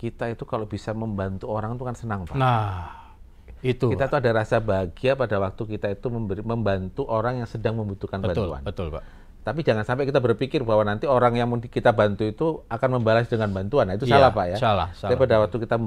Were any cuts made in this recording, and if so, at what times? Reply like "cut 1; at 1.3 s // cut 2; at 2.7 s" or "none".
none